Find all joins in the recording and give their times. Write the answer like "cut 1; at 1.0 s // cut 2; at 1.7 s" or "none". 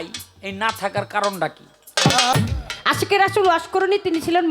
cut 1; at 2.3 s